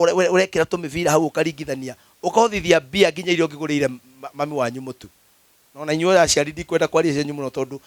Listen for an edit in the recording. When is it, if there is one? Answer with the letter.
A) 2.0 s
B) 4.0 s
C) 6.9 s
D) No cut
D